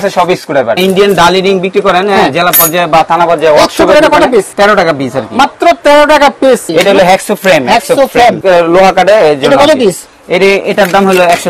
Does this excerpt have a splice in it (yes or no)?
yes